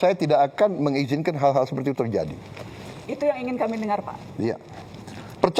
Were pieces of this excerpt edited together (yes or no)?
no